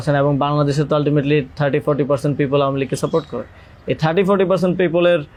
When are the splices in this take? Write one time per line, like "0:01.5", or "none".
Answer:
none